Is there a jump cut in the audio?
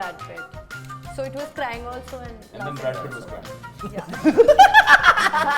no; 0 cuts

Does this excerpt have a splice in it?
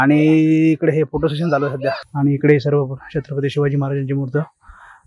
yes; 1 cut; at 2.1 s

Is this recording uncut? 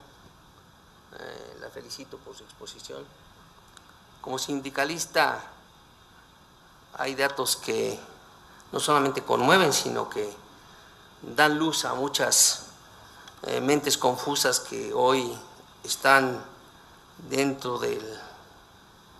no; 1 cut; at 11.2 s

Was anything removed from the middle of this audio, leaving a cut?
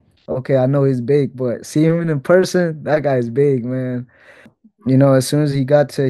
yes; 1 cut; at 4.3 s

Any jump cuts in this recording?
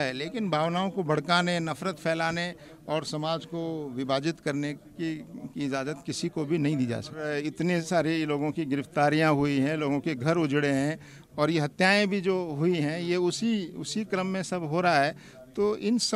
yes; 1 cut; at 7.4 s

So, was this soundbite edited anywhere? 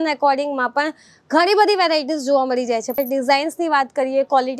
yes; 1 cut; at 3.0 s

